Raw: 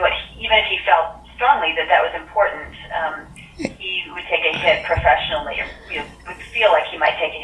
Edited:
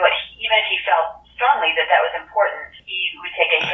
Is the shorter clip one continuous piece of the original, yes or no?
no